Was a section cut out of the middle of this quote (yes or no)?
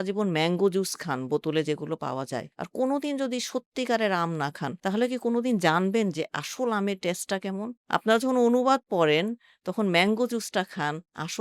no